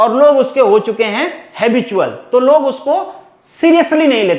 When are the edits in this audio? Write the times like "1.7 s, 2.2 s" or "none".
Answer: none